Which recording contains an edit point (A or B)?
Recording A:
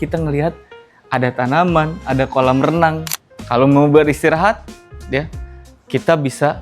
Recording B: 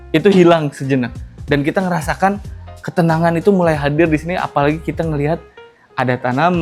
A